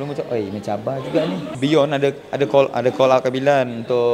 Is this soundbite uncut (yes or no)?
no